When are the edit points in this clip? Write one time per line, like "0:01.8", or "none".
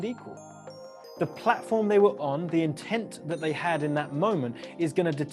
none